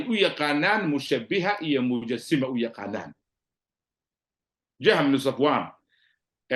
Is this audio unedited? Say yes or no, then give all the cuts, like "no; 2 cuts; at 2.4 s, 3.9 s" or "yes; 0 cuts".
yes; 0 cuts